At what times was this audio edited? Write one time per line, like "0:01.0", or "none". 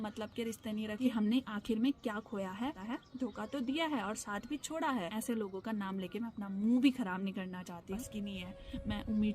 0:01.0
0:02.8
0:05.1
0:08.0